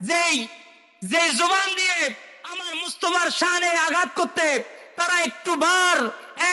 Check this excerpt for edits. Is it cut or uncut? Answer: uncut